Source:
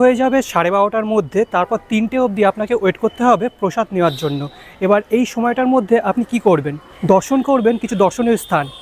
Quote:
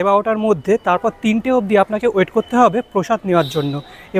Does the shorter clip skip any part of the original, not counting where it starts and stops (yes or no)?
no